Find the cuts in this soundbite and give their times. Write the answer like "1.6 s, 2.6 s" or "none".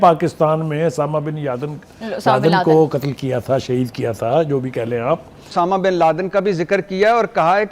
5.5 s